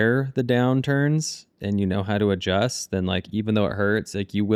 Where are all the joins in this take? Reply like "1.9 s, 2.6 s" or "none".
none